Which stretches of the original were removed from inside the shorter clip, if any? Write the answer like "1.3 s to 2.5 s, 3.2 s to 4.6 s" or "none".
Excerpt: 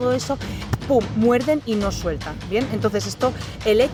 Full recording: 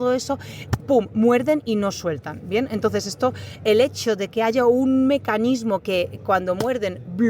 none